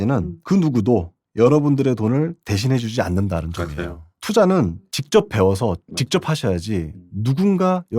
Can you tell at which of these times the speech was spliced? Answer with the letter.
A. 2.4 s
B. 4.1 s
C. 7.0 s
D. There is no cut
B